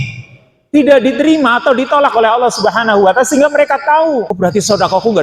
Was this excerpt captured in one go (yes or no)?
no